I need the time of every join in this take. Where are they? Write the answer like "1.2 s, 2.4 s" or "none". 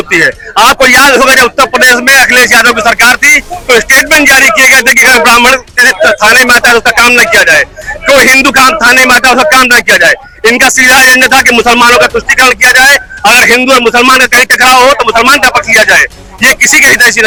none